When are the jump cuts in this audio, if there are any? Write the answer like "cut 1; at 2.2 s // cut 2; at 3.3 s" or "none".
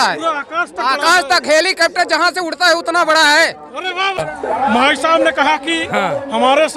none